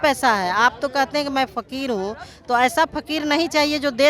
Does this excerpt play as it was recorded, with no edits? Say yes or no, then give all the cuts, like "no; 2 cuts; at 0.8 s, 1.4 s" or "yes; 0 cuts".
yes; 0 cuts